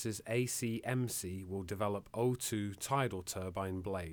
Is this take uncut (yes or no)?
yes